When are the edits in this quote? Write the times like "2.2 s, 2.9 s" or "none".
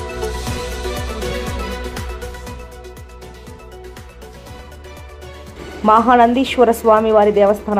none